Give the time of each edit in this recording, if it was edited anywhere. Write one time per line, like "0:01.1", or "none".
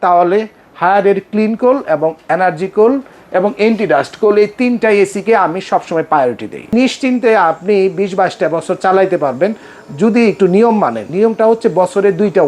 0:06.7
0:11.0